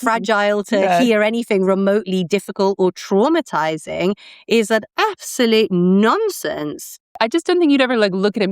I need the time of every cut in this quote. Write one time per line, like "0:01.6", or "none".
0:07.1